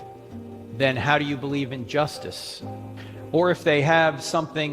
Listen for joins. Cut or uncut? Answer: cut